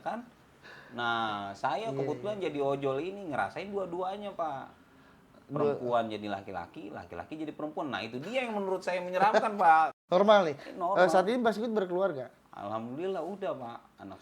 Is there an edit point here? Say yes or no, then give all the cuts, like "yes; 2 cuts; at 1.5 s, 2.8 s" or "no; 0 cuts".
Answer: yes; 1 cut; at 9.9 s